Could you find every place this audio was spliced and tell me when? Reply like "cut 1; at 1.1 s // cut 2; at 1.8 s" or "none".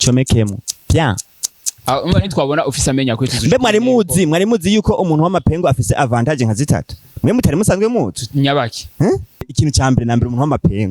cut 1; at 9.5 s

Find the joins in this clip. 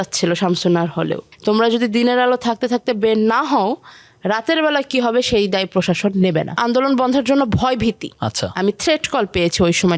cut 1; at 1.3 s // cut 2; at 6.6 s

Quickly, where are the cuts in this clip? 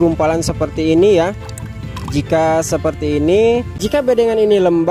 cut 1; at 3.7 s

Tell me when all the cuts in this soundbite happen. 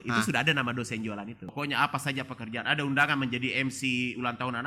cut 1; at 1.5 s

